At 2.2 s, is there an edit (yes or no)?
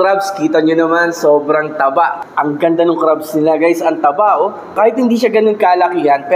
yes